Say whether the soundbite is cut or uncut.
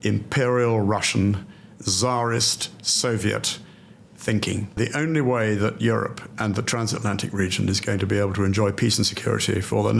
cut